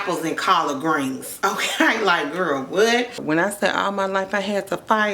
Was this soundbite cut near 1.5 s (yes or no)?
no